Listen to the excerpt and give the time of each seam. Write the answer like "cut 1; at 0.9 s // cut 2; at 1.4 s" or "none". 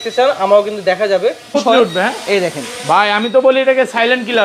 cut 1; at 1.6 s